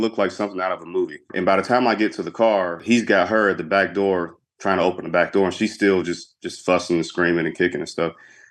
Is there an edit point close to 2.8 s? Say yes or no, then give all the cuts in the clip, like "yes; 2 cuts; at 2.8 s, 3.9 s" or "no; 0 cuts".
yes; 2 cuts; at 1.2 s, 2.8 s